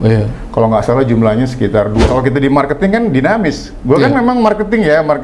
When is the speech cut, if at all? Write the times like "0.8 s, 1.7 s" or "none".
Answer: 2.1 s